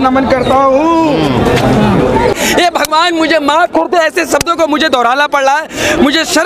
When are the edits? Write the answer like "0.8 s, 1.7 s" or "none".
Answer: 2.3 s